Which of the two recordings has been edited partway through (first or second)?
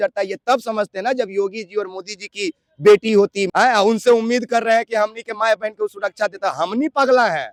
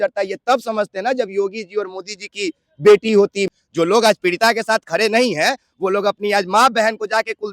second